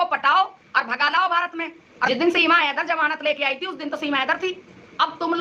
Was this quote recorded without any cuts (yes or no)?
no